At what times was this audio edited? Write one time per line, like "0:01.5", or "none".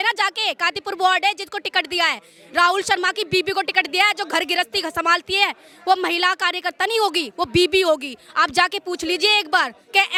none